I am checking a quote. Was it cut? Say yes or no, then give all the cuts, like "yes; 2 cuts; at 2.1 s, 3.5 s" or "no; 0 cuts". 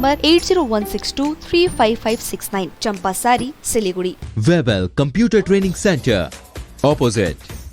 yes; 1 cut; at 4.2 s